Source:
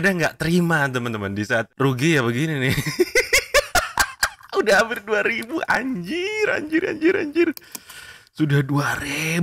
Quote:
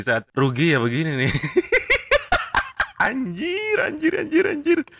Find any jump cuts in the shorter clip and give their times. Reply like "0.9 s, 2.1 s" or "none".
3.0 s